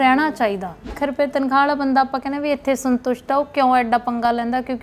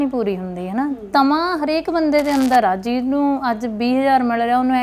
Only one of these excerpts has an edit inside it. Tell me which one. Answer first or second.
first